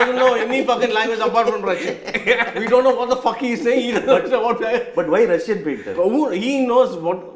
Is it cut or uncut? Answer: uncut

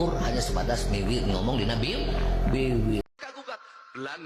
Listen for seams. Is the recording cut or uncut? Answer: cut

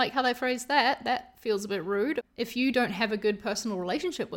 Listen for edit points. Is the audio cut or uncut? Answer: cut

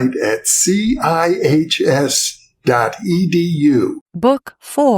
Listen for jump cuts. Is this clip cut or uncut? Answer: cut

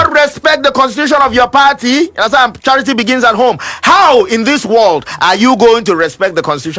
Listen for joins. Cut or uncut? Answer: uncut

